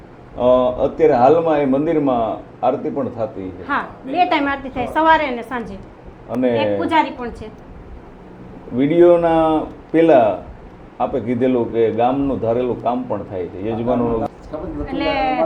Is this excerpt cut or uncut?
cut